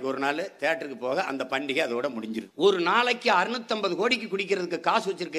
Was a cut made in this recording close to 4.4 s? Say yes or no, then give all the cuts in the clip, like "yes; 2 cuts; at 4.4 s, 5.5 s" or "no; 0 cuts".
no; 1 cut; at 2.5 s